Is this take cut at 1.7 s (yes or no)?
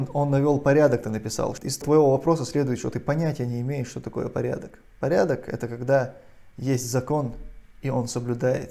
yes